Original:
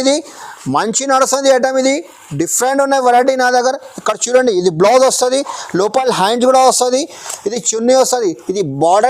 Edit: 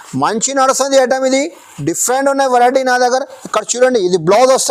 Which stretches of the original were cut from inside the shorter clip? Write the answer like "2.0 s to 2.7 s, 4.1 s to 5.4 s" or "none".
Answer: none